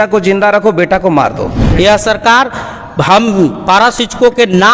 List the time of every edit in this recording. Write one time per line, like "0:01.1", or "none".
0:01.6